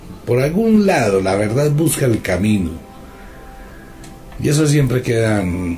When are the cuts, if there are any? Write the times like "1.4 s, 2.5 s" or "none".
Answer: 3.4 s